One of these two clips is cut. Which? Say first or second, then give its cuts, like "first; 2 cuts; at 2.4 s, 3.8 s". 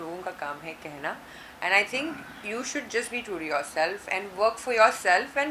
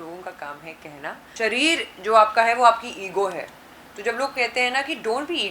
second; 1 cut; at 1.2 s